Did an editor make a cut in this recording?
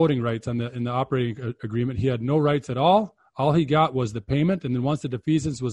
no; 0 cuts

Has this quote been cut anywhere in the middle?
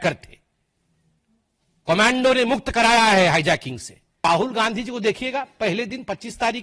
yes; 1 cut; at 4.2 s

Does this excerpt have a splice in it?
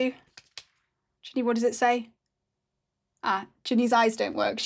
no; 0 cuts

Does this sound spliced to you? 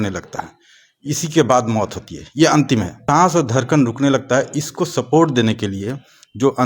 yes; 1 cut; at 3.0 s

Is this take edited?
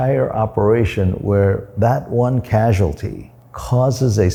no; 0 cuts

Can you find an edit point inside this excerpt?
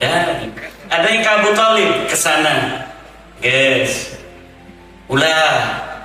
no; 0 cuts

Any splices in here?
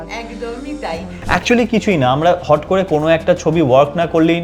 yes; 1 cut; at 1.1 s

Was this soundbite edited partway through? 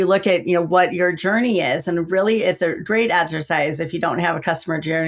no; 0 cuts

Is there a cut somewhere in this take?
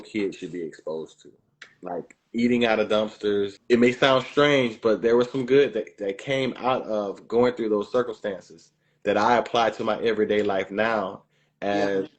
yes; 1 cut; at 3.6 s

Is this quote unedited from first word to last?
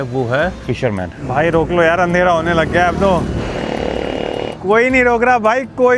no; 3 cuts; at 0.9 s, 3.4 s, 4.5 s

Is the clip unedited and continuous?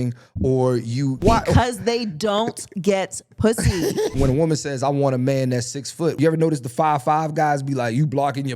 no; 3 cuts; at 1.2 s, 4.1 s, 6.2 s

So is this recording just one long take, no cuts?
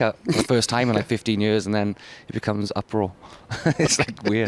yes; 0 cuts

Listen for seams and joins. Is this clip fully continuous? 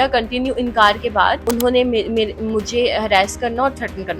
no; 1 cut; at 1.4 s

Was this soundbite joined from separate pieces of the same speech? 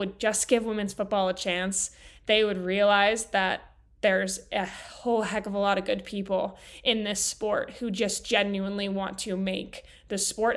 no; 0 cuts

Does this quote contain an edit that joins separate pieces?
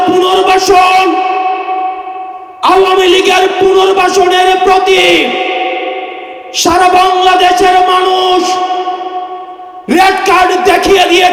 no; 0 cuts

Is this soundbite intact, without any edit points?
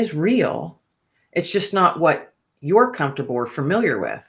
yes; 0 cuts

